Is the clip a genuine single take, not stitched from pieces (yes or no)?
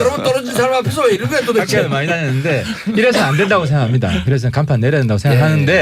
no